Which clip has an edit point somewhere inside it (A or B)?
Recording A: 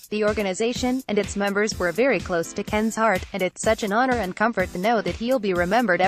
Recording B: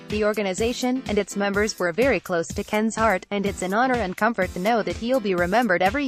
B